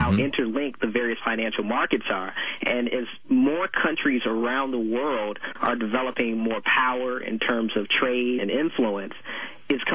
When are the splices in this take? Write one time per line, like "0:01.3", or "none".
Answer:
none